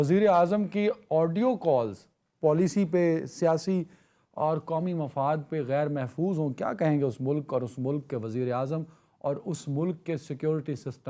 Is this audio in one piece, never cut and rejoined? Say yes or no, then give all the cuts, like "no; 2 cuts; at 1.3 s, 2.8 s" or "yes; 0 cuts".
yes; 0 cuts